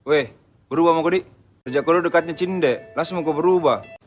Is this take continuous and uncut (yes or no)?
yes